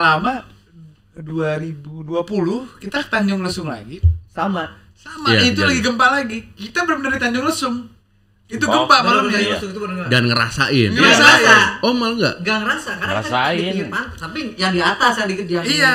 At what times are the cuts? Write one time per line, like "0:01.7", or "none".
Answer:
none